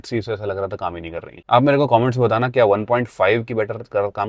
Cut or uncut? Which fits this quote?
uncut